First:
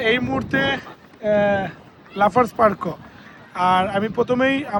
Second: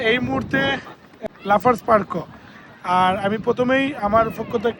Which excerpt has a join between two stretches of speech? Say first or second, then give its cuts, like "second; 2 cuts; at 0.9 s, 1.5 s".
second; 1 cut; at 1.1 s